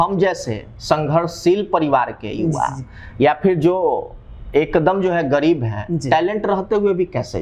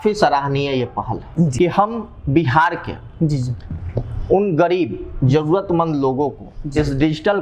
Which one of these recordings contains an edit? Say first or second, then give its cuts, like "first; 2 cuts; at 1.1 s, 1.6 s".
second; 1 cut; at 1.5 s